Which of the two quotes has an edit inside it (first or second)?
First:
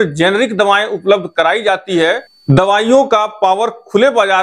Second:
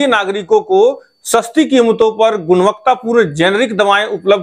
first